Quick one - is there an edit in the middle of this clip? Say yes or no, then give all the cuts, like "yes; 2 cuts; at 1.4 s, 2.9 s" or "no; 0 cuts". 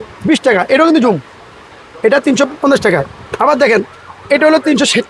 no; 0 cuts